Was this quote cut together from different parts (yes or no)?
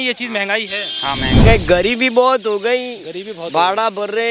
yes